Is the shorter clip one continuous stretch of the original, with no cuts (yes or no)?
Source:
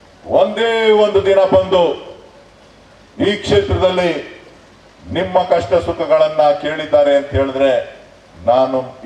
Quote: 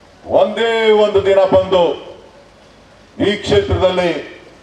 yes